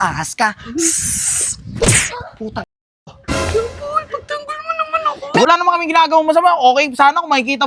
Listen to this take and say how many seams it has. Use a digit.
1